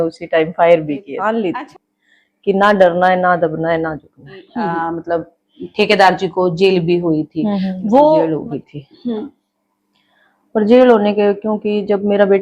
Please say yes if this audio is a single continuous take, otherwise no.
no